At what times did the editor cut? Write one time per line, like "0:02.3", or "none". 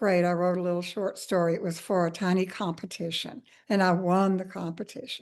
none